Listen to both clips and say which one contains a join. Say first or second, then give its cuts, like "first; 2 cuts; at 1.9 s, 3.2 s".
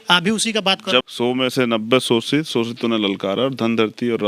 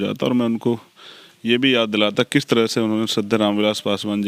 first; 1 cut; at 1.0 s